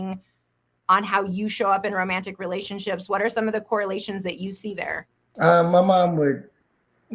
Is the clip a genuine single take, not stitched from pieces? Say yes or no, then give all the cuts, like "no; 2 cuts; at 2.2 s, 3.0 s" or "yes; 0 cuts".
no; 1 cut; at 5.2 s